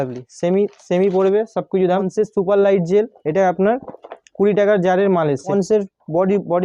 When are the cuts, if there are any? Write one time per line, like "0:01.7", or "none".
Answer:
0:02.1
0:05.5